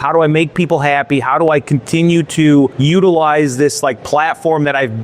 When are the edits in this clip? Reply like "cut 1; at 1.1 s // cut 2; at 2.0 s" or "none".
cut 1; at 2.8 s